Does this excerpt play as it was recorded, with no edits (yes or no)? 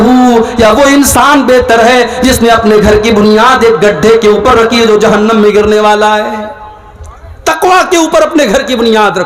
yes